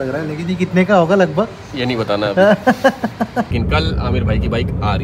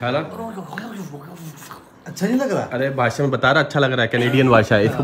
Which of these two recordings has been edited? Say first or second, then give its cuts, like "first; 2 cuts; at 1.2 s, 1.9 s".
first; 1 cut; at 3.5 s